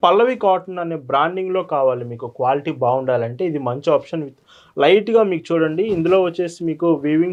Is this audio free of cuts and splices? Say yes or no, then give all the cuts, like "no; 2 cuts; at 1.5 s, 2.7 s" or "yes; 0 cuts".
yes; 0 cuts